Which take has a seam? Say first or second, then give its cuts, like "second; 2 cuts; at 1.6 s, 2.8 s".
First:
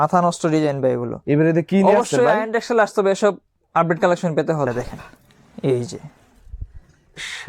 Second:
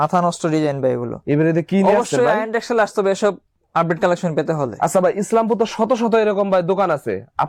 first; 1 cut; at 4.7 s